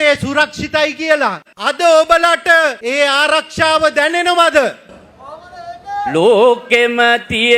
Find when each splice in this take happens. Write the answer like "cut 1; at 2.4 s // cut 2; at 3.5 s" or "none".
cut 1; at 1.5 s // cut 2; at 6.1 s